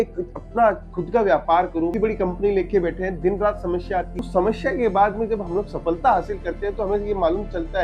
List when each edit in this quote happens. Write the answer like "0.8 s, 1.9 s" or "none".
1.9 s, 4.2 s